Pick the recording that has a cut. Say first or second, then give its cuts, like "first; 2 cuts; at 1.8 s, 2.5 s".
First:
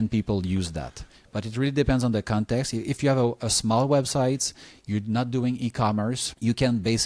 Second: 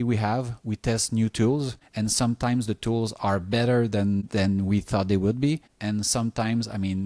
second; 3 cuts; at 1.8 s, 4.3 s, 5.7 s